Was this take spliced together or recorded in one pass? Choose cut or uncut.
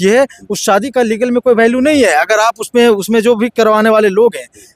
uncut